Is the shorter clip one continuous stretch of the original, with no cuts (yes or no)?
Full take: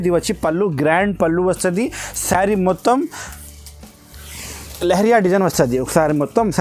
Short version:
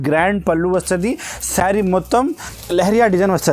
no